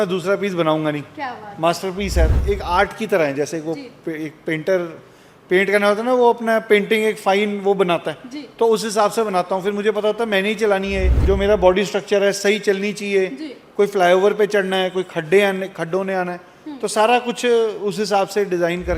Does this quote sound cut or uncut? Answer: cut